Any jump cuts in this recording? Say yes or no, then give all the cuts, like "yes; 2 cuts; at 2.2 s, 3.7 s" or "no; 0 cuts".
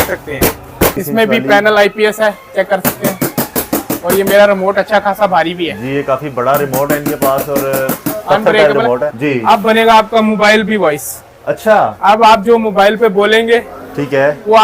yes; 2 cuts; at 1.0 s, 9.1 s